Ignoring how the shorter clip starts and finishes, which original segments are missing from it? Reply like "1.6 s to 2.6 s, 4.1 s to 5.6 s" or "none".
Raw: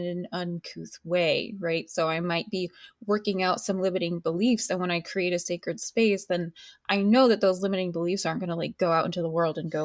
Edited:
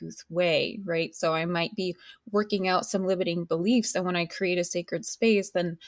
none